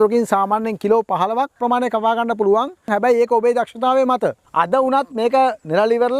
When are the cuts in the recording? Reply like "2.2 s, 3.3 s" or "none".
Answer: 2.9 s, 4.4 s